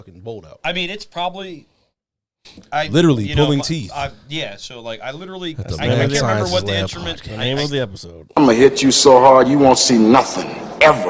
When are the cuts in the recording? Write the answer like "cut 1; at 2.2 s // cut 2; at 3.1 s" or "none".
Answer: cut 1; at 8.4 s